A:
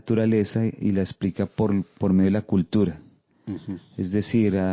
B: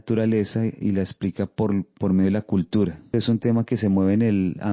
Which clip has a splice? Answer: B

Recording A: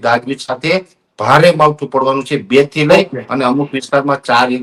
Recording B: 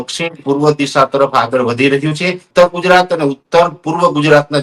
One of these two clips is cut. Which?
B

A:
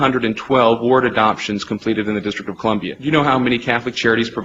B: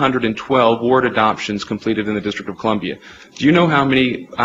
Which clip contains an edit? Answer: A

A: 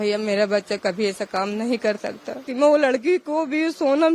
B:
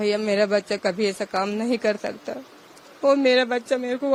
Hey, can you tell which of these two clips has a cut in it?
A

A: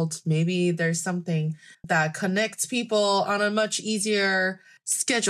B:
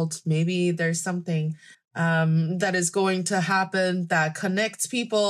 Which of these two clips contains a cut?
A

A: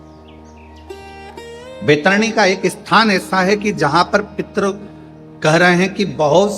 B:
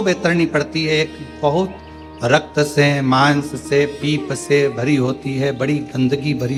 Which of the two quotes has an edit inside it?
A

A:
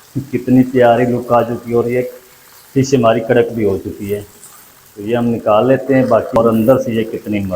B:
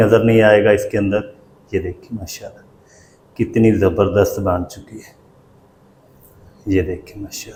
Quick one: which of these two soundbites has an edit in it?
A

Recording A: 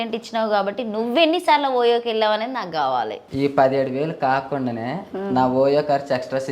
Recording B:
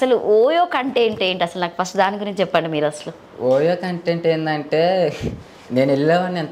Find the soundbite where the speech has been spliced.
A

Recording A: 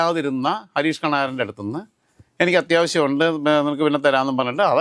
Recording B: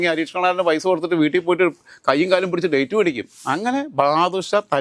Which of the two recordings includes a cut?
B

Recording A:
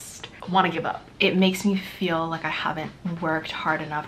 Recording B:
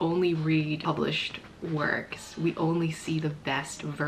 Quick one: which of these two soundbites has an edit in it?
A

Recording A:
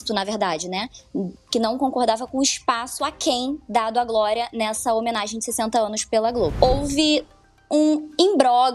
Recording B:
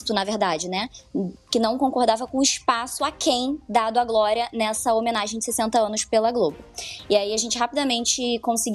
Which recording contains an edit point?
A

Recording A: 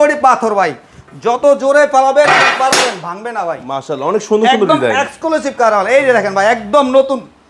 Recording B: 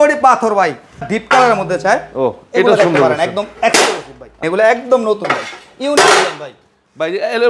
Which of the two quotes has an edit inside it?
B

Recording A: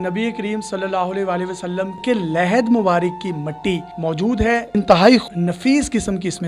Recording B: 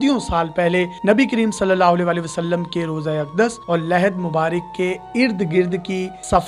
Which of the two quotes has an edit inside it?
A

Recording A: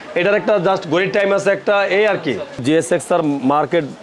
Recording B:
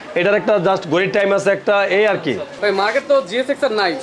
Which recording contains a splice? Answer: A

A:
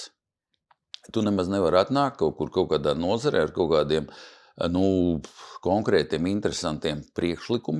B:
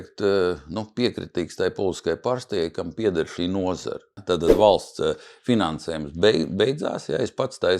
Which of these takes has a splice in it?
B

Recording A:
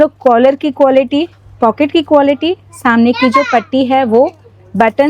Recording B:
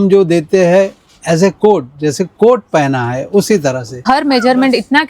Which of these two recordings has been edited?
B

